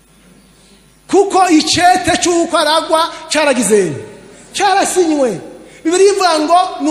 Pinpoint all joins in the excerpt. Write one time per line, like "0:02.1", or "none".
none